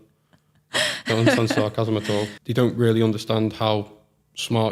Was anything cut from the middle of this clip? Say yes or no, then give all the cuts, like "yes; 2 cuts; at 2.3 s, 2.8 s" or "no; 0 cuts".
yes; 1 cut; at 2.4 s